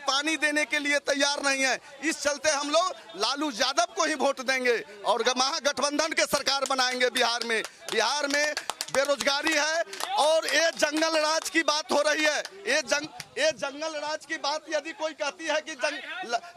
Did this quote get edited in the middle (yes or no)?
no